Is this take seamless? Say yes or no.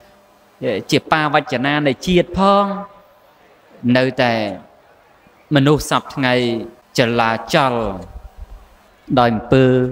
no